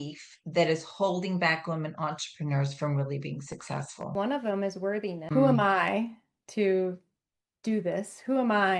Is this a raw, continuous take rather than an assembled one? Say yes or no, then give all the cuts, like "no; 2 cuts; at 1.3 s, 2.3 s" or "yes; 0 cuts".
no; 2 cuts; at 4.1 s, 5.2 s